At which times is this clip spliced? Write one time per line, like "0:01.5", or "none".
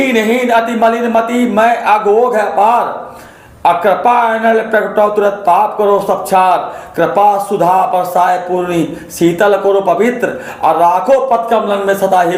none